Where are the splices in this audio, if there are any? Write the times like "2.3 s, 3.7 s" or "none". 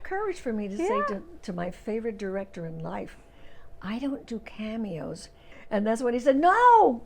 5.7 s